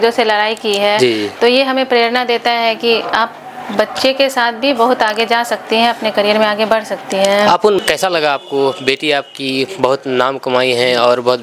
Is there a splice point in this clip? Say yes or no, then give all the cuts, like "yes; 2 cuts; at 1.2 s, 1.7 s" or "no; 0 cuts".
yes; 1 cut; at 7.8 s